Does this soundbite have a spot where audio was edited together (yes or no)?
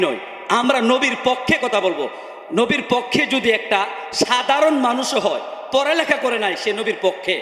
no